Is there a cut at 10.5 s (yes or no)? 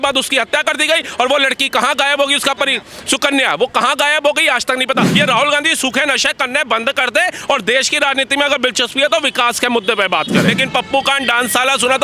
yes